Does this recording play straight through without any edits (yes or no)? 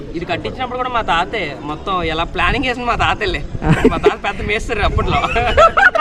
yes